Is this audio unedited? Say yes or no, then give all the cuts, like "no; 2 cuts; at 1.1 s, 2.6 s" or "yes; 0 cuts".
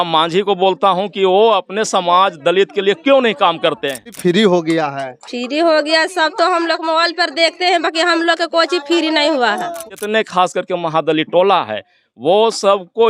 no; 2 cuts; at 4.2 s, 9.9 s